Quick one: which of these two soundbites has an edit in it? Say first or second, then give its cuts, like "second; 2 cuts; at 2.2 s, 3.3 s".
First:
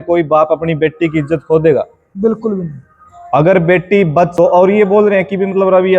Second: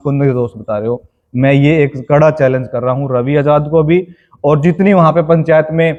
first; 1 cut; at 4.3 s